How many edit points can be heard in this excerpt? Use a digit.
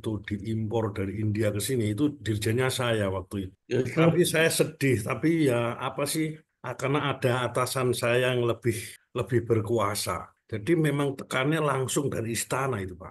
0